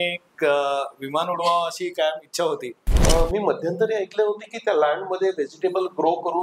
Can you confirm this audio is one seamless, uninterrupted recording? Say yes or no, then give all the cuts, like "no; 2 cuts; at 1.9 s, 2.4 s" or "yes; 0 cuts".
no; 1 cut; at 2.9 s